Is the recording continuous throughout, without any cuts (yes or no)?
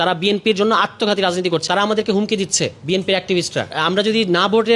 no